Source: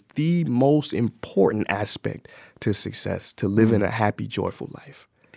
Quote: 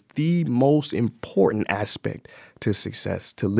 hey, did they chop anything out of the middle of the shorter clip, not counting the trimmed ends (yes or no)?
no